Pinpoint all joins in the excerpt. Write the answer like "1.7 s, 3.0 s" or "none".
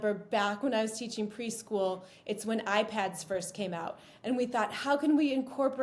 none